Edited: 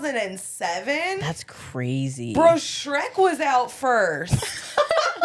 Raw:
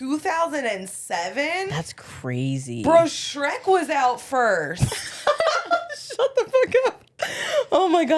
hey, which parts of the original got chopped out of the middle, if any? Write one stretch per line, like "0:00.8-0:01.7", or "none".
none